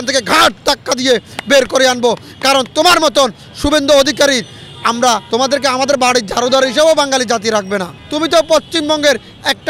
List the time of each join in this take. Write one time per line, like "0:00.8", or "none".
0:05.2
0:08.0